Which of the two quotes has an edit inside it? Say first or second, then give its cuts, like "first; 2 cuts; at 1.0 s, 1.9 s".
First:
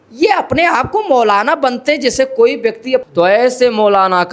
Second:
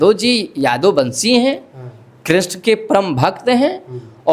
first; 1 cut; at 3.0 s